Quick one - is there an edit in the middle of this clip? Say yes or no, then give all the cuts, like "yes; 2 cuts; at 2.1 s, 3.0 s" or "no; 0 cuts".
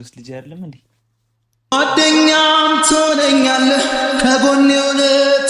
yes; 1 cut; at 1.7 s